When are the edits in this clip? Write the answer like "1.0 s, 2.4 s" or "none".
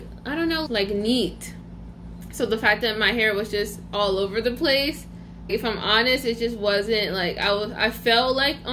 none